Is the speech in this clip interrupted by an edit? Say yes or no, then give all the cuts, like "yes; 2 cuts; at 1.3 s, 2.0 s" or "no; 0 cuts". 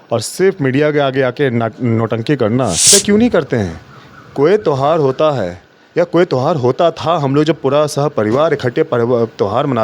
yes; 1 cut; at 2.9 s